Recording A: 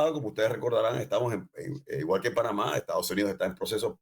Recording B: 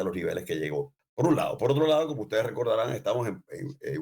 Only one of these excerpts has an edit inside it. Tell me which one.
B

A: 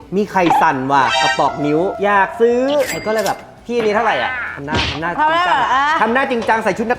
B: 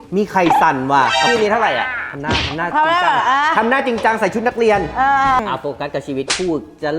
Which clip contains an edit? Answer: B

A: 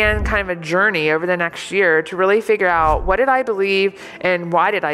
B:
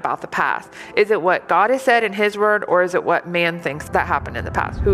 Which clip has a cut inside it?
B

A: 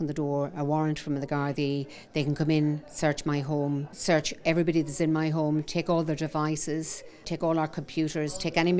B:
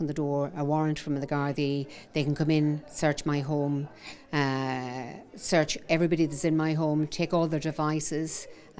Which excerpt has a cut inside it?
A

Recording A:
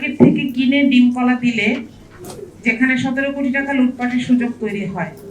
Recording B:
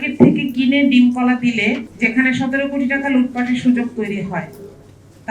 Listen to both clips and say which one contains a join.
B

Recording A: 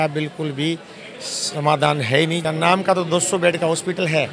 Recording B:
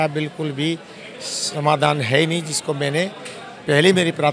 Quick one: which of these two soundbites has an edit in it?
A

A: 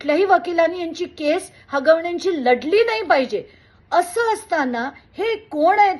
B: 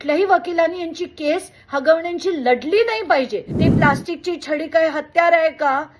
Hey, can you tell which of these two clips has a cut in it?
B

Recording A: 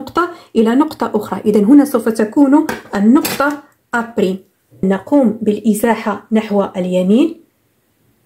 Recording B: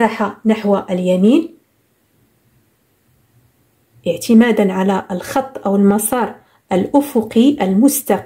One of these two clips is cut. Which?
A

